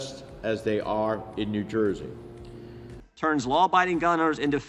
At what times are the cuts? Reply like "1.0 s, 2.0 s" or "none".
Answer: 2.9 s